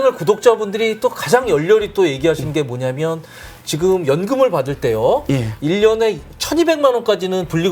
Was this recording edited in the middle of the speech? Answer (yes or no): no